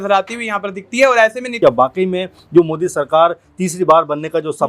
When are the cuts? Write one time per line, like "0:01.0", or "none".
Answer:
0:01.5